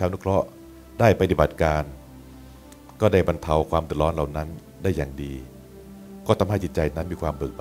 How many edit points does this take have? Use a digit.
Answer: 0